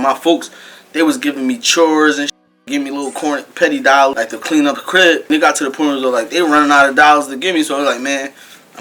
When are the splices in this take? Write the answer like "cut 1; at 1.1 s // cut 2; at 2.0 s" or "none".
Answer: cut 1; at 4.1 s // cut 2; at 5.2 s